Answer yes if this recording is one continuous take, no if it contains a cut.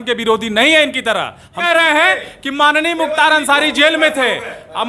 no